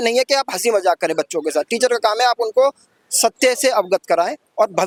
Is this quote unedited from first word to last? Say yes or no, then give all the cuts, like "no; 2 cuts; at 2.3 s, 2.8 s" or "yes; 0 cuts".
yes; 0 cuts